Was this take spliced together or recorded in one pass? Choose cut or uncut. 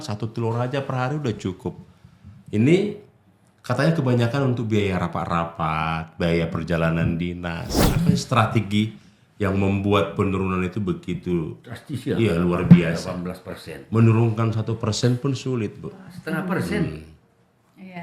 cut